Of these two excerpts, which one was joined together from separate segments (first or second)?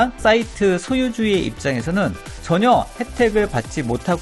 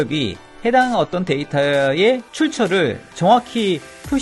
second